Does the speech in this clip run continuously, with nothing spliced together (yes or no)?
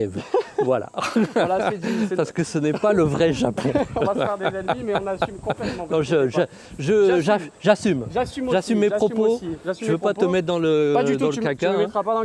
yes